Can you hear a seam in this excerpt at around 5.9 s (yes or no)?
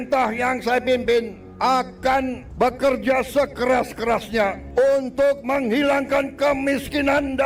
no